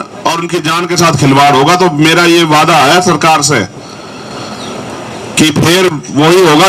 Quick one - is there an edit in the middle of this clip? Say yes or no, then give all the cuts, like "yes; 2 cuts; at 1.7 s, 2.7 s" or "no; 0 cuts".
no; 0 cuts